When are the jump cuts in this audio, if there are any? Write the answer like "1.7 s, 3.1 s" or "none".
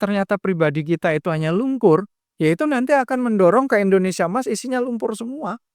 none